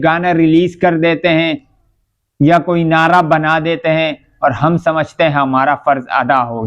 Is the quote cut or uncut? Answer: uncut